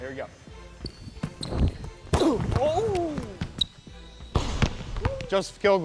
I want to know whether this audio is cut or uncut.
cut